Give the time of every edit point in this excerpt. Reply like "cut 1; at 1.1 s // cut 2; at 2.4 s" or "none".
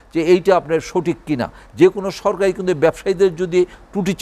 cut 1; at 1.6 s